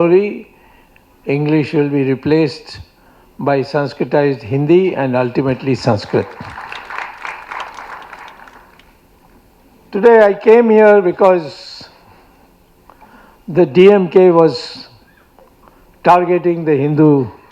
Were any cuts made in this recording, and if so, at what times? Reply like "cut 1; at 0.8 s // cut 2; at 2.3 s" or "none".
none

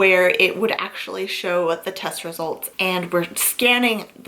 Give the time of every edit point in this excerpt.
cut 1; at 2.7 s

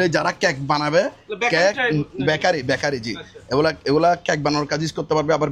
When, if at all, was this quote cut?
none

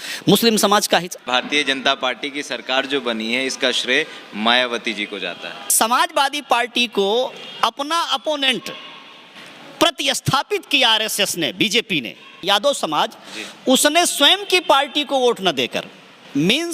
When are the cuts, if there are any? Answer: cut 1; at 1.2 s // cut 2; at 5.6 s // cut 3; at 12.4 s

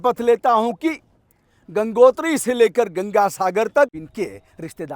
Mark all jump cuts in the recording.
cut 1; at 4.0 s

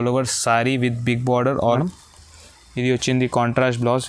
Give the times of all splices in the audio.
cut 1; at 1.8 s

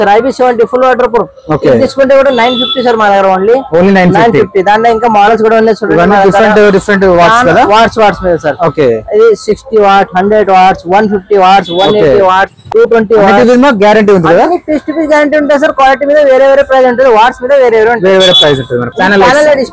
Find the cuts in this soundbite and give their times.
none

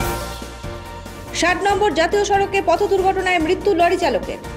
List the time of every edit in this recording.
none

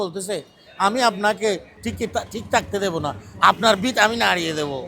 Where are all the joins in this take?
cut 1; at 1.8 s

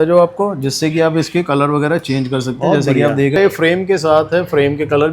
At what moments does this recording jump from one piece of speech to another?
cut 1; at 3.4 s

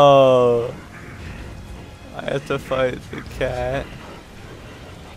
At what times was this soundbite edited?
cut 1; at 3.8 s

